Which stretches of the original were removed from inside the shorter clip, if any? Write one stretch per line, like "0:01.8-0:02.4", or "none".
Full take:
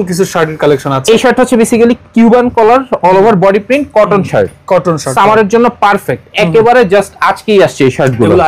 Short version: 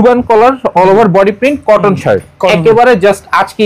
0:04.7-0:06.3